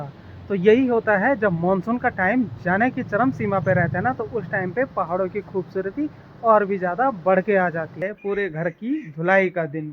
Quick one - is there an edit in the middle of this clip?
yes; 1 cut; at 7.9 s

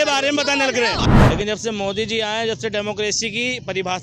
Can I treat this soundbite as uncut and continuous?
no; 1 cut; at 1.0 s

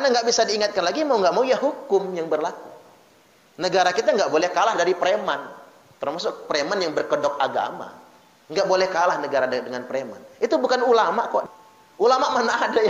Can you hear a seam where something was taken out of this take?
yes; 1 cut; at 11.4 s

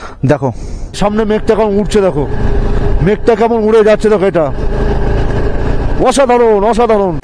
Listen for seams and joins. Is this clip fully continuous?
no; 1 cut; at 1.0 s

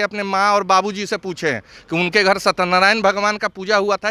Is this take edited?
no; 0 cuts

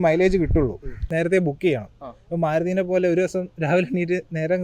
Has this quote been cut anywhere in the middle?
yes; 1 cut; at 0.9 s

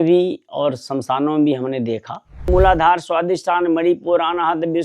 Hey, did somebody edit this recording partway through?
yes; 1 cut; at 2.5 s

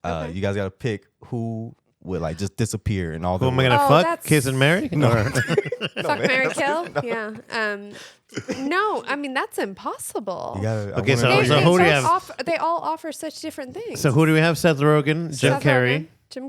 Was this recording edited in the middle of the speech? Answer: no; 0 cuts

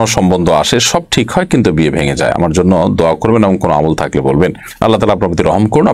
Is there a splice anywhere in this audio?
no; 0 cuts

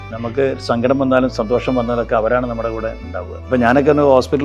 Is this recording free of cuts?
no; 1 cut; at 3.3 s

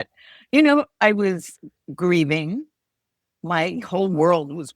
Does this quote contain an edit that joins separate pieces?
no; 0 cuts

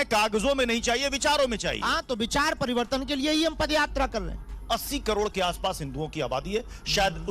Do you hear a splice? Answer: yes; 1 cut; at 4.5 s

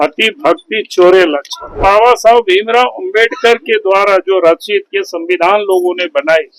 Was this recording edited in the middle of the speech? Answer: yes; 1 cut; at 1.8 s

